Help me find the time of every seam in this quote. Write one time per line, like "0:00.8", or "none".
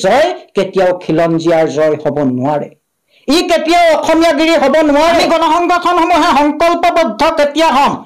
0:05.2